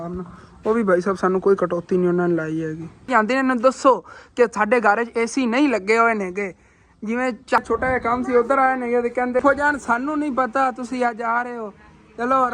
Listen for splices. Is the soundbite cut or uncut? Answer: cut